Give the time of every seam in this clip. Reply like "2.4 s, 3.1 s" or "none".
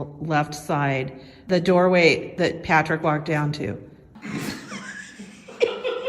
1.4 s, 2.3 s, 4.1 s